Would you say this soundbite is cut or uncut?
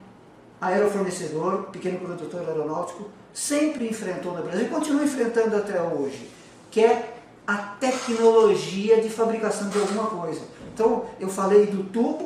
uncut